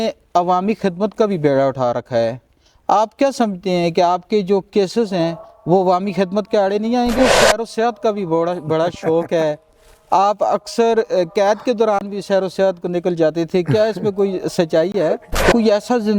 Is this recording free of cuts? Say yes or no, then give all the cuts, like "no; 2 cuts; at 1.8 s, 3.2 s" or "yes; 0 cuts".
no; 2 cuts; at 7.1 s, 15.5 s